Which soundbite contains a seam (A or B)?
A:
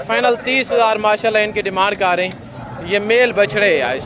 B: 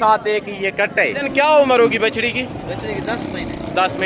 B